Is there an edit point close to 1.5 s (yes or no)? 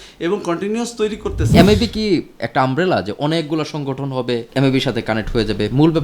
yes